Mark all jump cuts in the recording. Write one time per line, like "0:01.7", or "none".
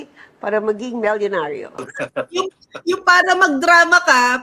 0:01.9

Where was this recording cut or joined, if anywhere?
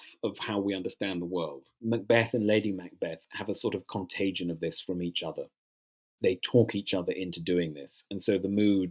0:01.7
0:06.2

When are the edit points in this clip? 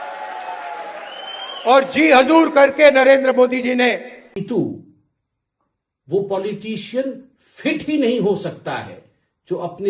0:04.4

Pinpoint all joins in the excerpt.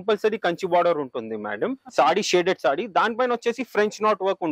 0:01.8

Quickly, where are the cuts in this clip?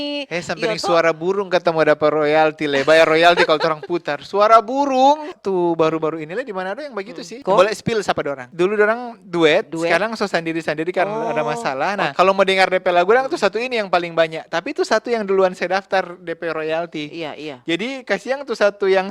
0:05.4
0:07.3
0:08.4
0:12.1

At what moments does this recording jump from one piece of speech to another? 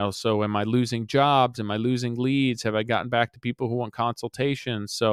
none

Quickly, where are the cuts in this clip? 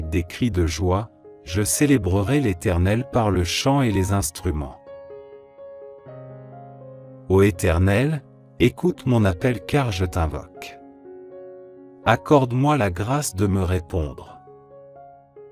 none

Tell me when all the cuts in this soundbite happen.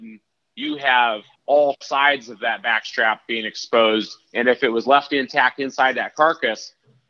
0:01.3

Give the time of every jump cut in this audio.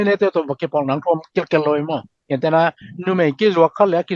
0:02.1

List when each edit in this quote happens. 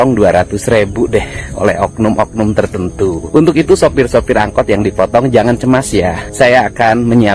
0:03.2
0:06.2

